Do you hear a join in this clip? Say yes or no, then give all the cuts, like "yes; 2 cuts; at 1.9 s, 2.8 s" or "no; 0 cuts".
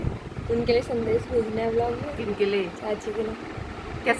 no; 0 cuts